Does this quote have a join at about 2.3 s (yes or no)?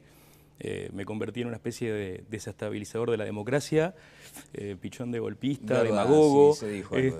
no